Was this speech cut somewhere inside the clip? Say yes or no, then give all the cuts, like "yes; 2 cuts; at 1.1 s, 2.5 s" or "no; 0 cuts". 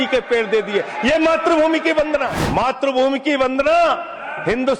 yes; 1 cut; at 2.4 s